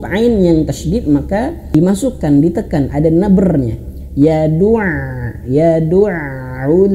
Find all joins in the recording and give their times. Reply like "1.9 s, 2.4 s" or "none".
1.7 s